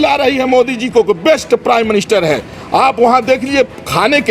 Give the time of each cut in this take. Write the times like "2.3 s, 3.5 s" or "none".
none